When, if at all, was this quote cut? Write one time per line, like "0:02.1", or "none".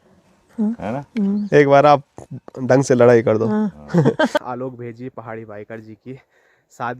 0:04.4